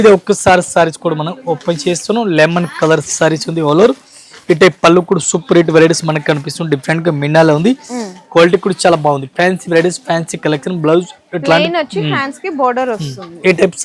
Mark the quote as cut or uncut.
uncut